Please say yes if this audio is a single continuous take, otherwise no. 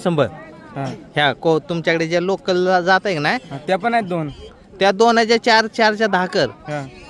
yes